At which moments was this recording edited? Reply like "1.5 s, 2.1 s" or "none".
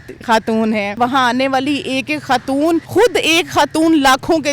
0.9 s, 2.9 s